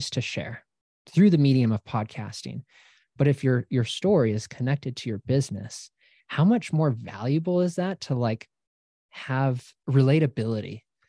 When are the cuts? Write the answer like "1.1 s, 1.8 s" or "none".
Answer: 9.7 s